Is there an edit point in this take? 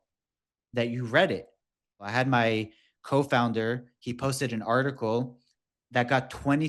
yes; 1 cut; at 2.0 s

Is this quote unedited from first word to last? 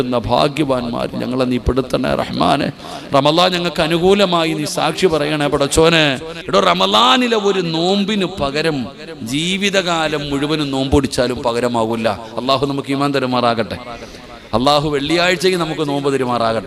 no; 1 cut; at 6.3 s

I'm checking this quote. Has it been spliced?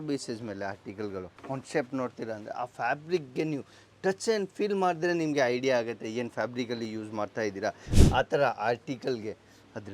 yes; 2 cuts; at 1.3 s, 7.9 s

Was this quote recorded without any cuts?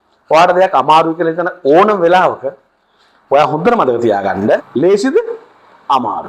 no; 1 cut; at 4.7 s

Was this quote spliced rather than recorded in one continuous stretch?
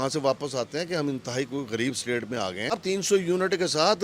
yes; 1 cut; at 2.7 s

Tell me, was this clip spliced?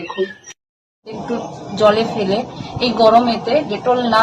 yes; 1 cut; at 1.2 s

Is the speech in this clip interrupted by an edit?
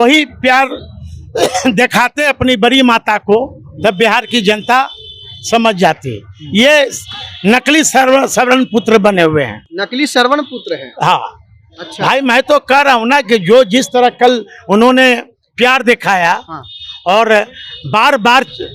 no; 0 cuts

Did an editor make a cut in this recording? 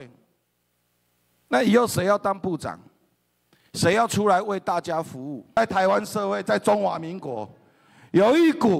yes; 1 cut; at 5.6 s

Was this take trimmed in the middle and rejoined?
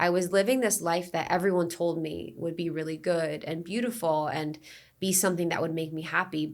no; 0 cuts

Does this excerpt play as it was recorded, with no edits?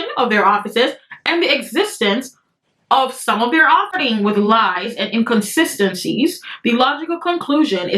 no; 1 cut; at 4.0 s

